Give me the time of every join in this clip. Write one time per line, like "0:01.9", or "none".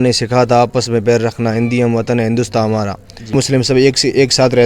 0:03.3